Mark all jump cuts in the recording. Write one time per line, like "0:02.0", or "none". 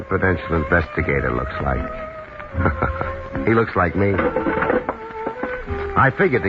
0:02.4